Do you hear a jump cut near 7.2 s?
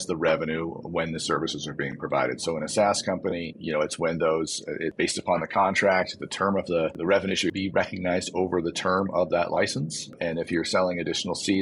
yes; 4 cuts; at 3.6 s, 4.9 s, 7.2 s, 10.1 s

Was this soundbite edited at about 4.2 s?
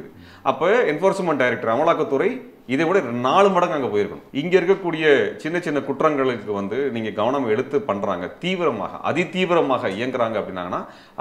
yes; 1 cut; at 4.2 s

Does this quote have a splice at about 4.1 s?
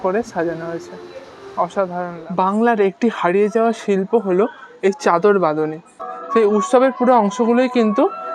no; 2 cuts; at 2.3 s, 6.1 s

